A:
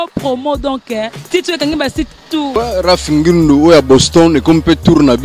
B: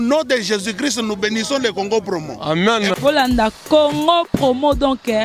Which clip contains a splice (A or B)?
A